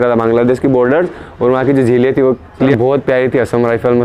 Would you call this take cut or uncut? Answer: cut